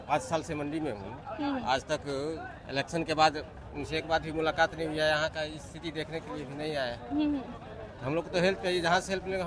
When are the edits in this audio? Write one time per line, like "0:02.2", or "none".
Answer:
none